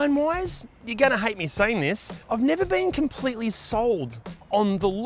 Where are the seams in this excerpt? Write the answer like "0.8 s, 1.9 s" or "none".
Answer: 2.1 s

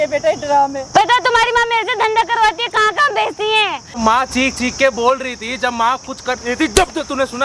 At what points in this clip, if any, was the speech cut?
1.1 s, 4.0 s

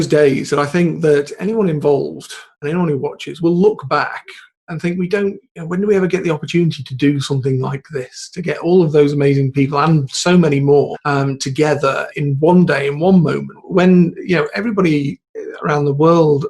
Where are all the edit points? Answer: 3.3 s, 11.0 s, 12.1 s, 13.5 s

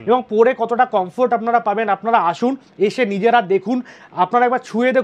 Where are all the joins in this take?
none

